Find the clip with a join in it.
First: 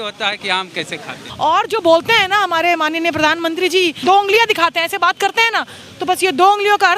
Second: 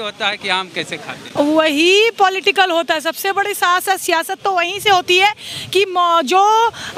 first; 2 cuts; at 1.2 s, 4.0 s

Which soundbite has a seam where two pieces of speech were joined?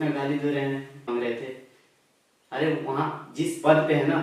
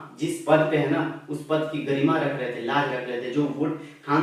first; 1 cut; at 1.1 s

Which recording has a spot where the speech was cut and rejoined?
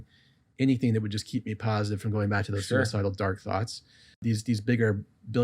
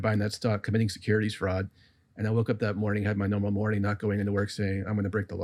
first; 1 cut; at 4.2 s

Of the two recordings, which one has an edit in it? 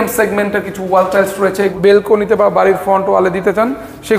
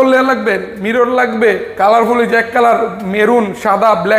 first; 1 cut; at 1.7 s

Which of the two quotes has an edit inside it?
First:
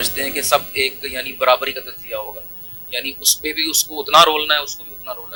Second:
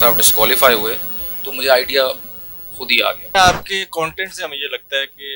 second; 1 cut; at 3.3 s

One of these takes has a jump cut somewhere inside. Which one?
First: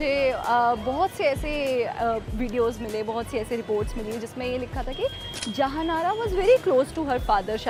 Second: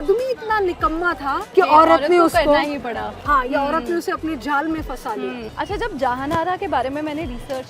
second; 2 cuts; at 1.3 s, 5.5 s

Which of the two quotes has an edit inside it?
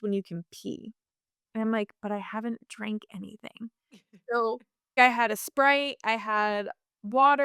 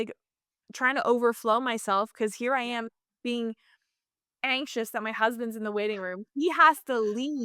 first; 1 cut; at 4.9 s

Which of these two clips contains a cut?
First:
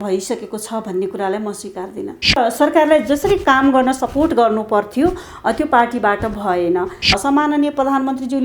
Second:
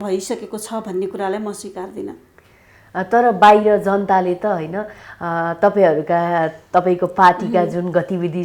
first; 2 cuts; at 2.4 s, 7.1 s

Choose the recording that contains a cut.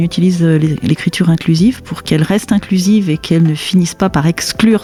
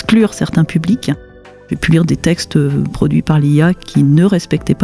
second; 1 cut; at 1.5 s

